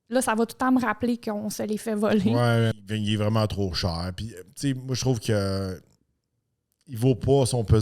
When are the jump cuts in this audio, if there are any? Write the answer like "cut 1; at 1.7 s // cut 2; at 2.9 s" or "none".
cut 1; at 2.8 s